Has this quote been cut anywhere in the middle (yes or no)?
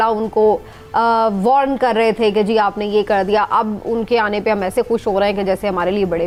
no